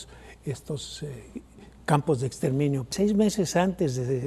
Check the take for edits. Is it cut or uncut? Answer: cut